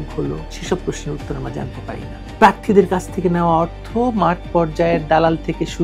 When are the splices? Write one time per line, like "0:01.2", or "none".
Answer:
0:02.3